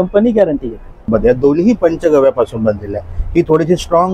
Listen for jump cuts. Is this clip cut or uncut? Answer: cut